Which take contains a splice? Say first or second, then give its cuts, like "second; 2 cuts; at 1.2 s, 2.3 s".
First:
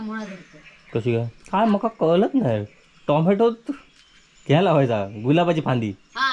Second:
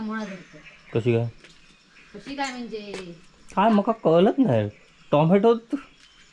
first; 1 cut; at 1.4 s